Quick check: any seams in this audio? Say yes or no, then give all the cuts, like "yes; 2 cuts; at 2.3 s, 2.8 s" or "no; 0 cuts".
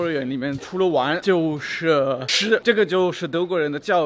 yes; 2 cuts; at 0.9 s, 2.5 s